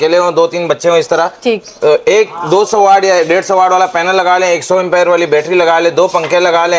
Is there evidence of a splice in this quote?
no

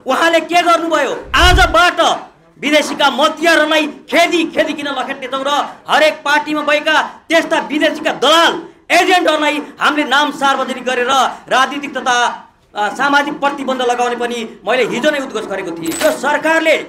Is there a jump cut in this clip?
yes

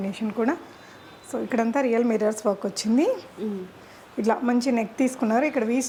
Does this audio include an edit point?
no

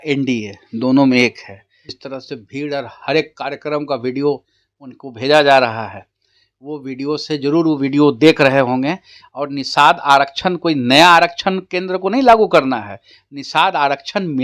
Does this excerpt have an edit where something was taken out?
yes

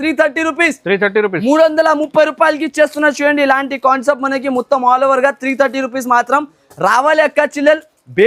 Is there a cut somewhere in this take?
no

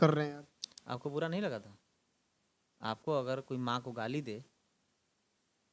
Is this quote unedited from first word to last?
yes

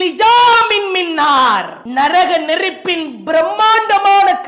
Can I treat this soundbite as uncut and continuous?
no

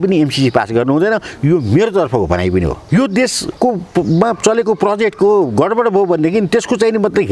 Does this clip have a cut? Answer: yes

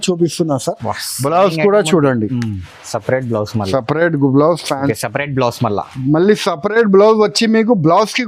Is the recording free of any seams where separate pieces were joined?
no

